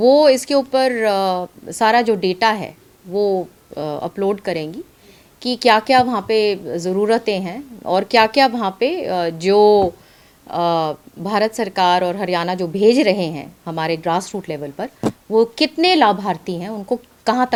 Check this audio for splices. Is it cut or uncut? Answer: uncut